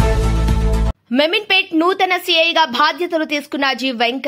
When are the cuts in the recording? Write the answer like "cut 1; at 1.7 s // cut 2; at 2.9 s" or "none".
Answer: cut 1; at 1.0 s